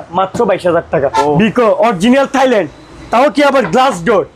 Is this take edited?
yes; 1 cut; at 1.2 s

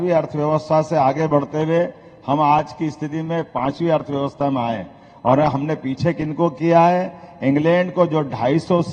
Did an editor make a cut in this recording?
no; 0 cuts

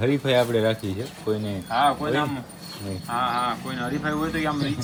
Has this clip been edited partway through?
no; 0 cuts

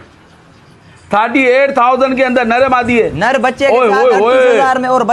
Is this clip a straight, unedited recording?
yes; 0 cuts

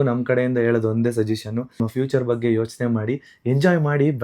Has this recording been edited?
yes; 1 cut; at 1.8 s

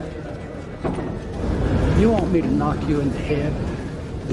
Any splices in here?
yes; 1 cut; at 1.3 s

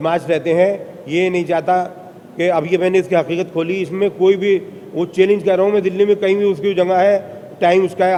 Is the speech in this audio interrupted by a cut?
no; 0 cuts

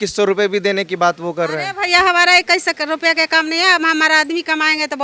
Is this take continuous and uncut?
yes; 0 cuts

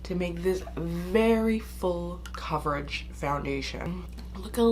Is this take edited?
yes; 2 cuts; at 2.3 s, 4.0 s

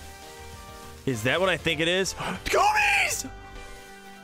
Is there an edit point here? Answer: no; 0 cuts

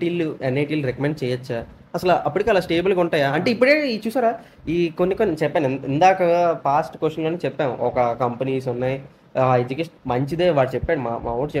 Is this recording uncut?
yes; 0 cuts

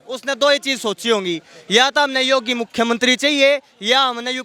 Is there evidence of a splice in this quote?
no; 0 cuts

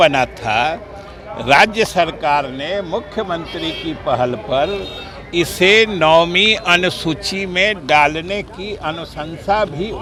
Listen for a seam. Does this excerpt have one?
no; 0 cuts

